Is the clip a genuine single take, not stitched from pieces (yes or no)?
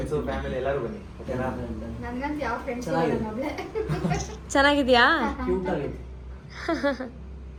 yes